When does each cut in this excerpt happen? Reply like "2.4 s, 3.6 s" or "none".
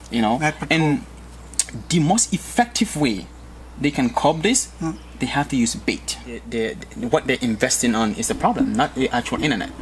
6.5 s